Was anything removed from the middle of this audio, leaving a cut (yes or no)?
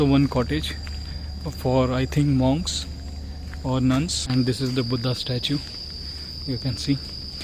yes